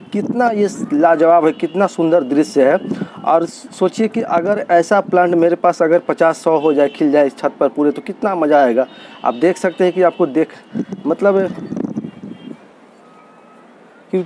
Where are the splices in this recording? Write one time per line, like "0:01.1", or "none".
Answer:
0:11.6